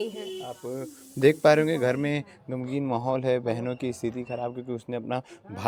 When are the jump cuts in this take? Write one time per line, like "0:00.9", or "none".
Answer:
none